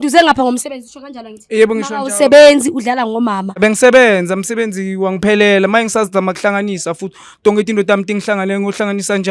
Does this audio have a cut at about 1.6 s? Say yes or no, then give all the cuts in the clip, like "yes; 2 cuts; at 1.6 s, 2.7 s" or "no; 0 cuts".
no; 1 cut; at 3.5 s